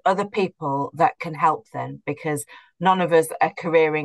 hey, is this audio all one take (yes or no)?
yes